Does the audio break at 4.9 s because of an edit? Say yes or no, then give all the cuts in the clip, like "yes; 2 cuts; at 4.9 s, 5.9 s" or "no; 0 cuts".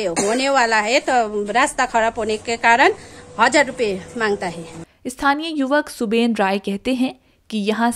no; 0 cuts